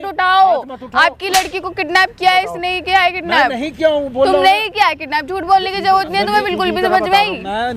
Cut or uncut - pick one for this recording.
uncut